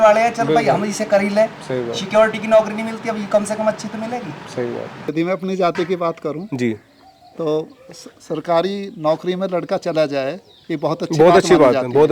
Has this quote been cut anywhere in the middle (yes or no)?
yes